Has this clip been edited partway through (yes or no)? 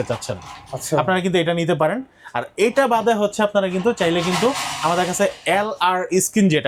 no